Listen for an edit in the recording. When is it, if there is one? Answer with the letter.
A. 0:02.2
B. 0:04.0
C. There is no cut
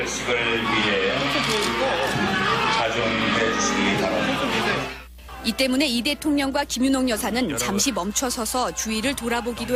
C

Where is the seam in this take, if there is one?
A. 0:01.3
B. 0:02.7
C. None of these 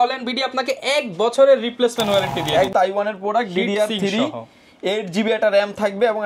B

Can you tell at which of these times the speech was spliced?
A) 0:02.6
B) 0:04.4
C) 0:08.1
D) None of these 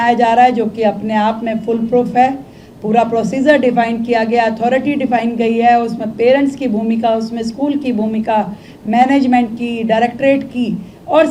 D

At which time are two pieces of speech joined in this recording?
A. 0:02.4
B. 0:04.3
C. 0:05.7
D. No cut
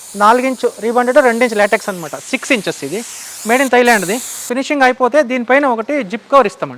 B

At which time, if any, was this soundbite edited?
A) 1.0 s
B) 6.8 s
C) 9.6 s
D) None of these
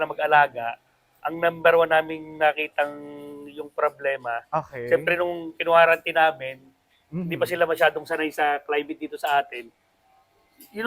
D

